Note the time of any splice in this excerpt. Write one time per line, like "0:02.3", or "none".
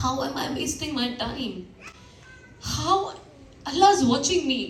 none